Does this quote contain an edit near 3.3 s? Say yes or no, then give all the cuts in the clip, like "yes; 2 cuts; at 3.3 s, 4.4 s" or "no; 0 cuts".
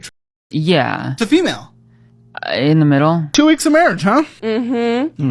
yes; 1 cut; at 3.3 s